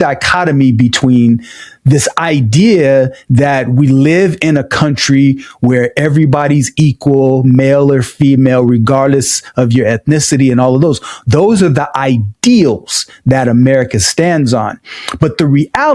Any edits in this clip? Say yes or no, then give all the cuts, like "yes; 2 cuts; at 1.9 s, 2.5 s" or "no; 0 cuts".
no; 0 cuts